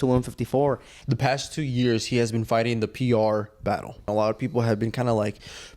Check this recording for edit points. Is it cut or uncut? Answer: cut